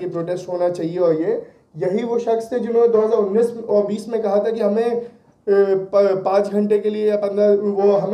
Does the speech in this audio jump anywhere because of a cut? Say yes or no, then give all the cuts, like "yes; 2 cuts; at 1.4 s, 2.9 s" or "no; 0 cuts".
no; 0 cuts